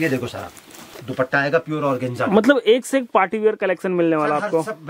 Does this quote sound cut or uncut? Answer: cut